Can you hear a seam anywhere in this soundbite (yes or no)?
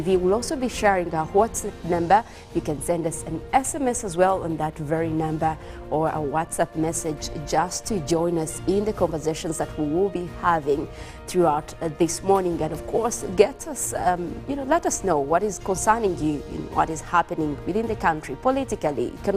yes